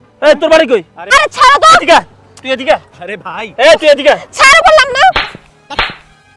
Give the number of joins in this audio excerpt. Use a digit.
1